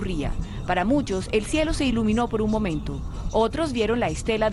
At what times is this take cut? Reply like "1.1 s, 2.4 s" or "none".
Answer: none

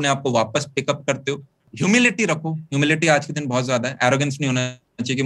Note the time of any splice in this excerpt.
none

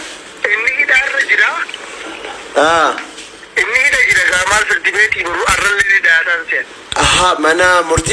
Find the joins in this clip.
none

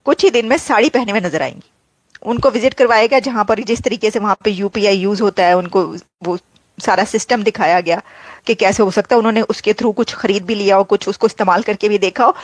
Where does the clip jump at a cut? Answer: none

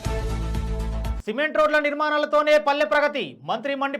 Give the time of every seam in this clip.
1.1 s

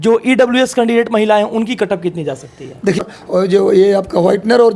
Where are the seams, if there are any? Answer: 3.1 s

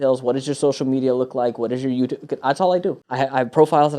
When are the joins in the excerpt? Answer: 3.0 s

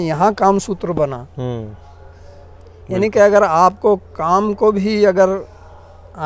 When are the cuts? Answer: none

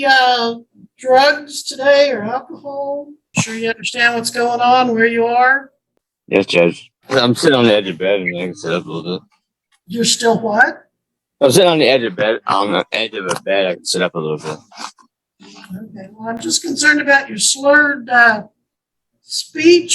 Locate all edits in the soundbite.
3.2 s, 6.9 s

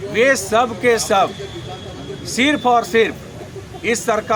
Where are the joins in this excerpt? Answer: none

